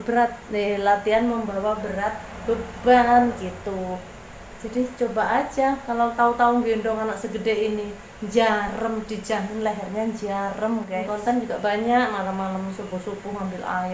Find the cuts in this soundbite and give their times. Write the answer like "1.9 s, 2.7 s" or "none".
11.0 s